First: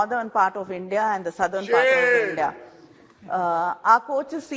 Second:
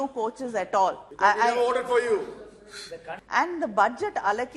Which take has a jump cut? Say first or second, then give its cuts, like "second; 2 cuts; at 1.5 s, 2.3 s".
second; 2 cuts; at 1.1 s, 3.1 s